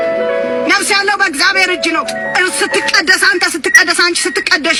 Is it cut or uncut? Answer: uncut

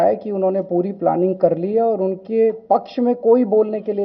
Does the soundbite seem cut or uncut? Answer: uncut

